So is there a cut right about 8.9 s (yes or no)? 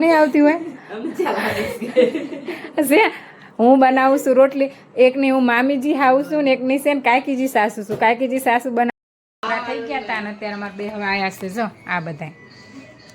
yes